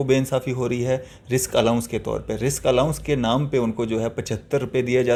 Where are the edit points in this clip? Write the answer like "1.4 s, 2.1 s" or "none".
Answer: none

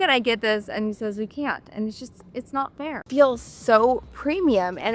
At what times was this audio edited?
3.1 s

